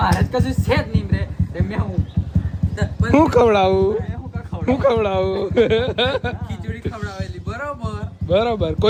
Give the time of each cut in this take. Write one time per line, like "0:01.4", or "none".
none